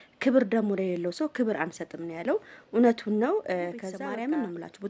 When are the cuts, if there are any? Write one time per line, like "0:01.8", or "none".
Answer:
0:04.0